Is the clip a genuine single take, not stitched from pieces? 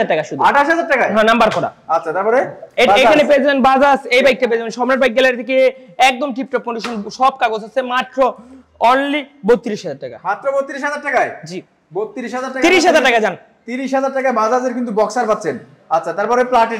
yes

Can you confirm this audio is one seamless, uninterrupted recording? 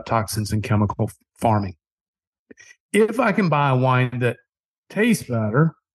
yes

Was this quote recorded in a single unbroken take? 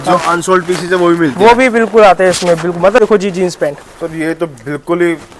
no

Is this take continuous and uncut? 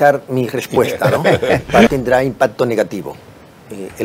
no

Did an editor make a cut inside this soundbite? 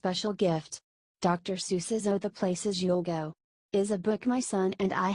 yes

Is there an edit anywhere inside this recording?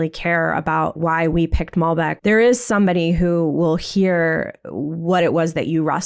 yes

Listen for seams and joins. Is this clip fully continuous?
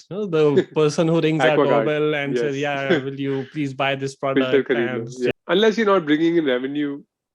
no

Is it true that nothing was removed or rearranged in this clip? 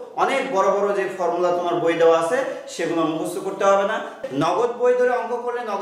no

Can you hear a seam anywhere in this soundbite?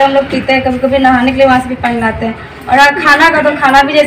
no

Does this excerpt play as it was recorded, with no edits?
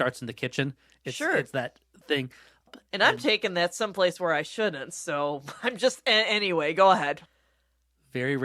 no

